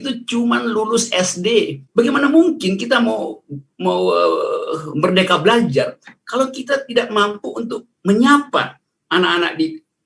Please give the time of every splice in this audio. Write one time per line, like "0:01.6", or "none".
0:01.8